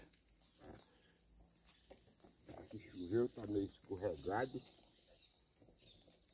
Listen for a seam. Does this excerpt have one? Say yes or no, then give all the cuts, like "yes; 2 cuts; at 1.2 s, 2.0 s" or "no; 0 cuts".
no; 0 cuts